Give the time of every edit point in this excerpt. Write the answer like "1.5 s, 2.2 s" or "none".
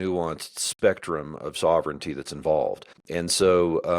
2.9 s